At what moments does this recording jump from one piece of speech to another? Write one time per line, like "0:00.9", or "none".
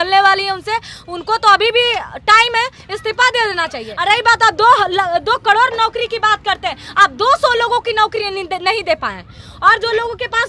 0:03.9